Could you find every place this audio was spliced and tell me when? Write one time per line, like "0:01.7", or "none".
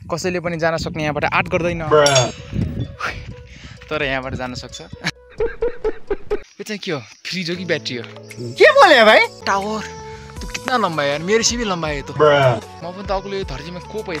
0:06.5
0:09.4
0:12.8